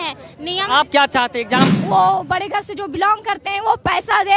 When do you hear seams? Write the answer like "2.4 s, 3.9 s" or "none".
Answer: 1.7 s